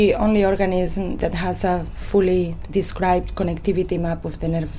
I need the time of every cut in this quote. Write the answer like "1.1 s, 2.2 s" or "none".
1.2 s, 2.6 s